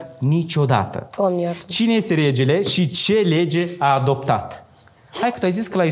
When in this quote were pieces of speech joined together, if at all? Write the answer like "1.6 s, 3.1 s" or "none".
none